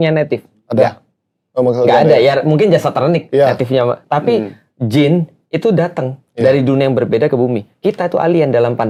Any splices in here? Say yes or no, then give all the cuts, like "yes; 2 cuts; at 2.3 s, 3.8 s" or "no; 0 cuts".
no; 0 cuts